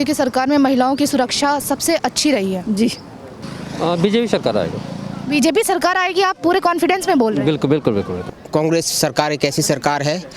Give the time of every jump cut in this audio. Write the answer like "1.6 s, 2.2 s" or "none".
3.2 s, 8.4 s